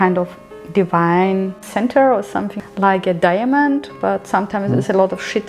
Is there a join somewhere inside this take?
no; 0 cuts

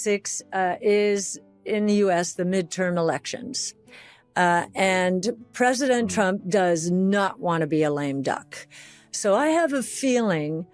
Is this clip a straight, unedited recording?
yes; 0 cuts

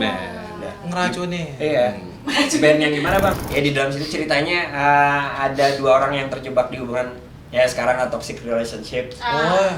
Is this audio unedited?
no; 1 cut; at 3.4 s

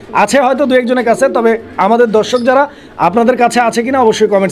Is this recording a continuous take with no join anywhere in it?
yes; 0 cuts

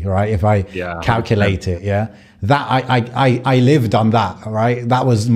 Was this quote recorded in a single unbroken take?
yes; 0 cuts

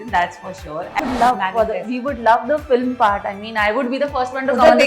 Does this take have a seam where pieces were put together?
yes; 1 cut; at 1.0 s

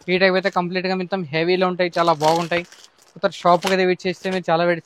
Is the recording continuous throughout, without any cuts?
yes; 0 cuts

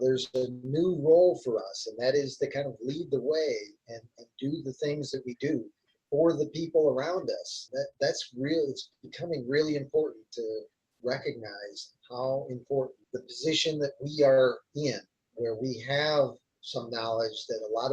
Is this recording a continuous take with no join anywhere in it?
no; 2 cuts; at 7.6 s, 13.0 s

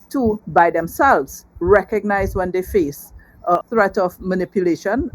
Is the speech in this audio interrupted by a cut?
yes; 1 cut; at 3.6 s

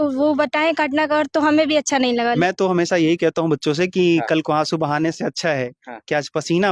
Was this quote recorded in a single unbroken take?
no; 1 cut; at 2.4 s

